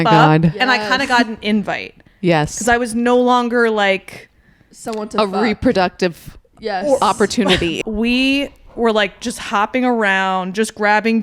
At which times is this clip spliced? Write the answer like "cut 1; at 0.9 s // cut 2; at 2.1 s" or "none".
cut 1; at 7.8 s